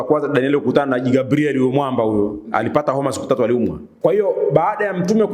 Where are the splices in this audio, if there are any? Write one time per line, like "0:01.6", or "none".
0:03.8